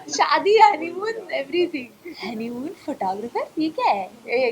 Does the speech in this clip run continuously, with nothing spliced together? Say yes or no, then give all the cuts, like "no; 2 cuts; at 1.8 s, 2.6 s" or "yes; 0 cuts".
no; 1 cut; at 2.0 s